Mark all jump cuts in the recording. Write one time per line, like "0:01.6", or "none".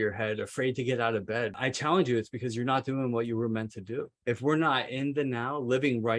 0:01.5
0:04.1